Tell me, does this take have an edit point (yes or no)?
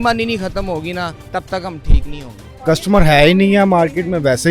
yes